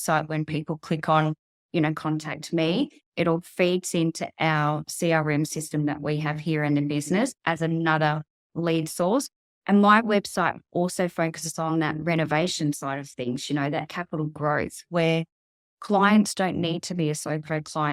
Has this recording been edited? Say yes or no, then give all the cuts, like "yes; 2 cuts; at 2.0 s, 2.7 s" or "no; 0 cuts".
no; 0 cuts